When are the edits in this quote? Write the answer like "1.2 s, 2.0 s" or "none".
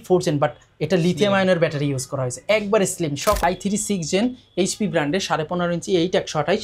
3.4 s